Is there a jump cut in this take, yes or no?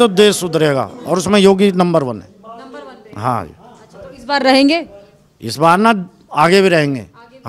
no